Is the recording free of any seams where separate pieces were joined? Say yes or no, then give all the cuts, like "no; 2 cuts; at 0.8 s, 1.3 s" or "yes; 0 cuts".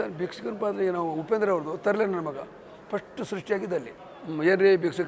no; 1 cut; at 4.0 s